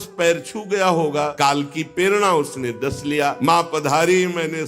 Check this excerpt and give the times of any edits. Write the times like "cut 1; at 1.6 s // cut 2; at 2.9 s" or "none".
cut 1; at 1.3 s // cut 2; at 3.4 s